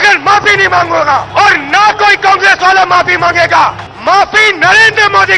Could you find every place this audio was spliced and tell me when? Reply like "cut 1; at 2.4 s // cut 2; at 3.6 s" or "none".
cut 1; at 1.3 s // cut 2; at 3.9 s